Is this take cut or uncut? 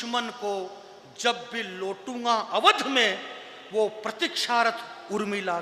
uncut